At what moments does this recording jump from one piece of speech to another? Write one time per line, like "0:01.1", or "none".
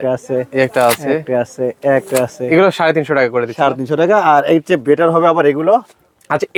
none